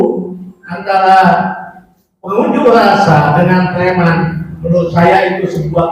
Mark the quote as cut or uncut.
uncut